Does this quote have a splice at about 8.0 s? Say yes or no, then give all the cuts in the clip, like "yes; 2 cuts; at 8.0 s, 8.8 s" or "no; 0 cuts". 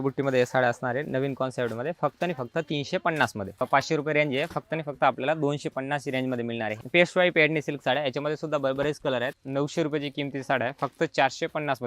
no; 3 cuts; at 3.7 s, 6.7 s, 9.3 s